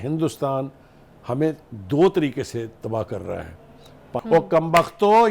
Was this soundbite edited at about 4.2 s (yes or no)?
yes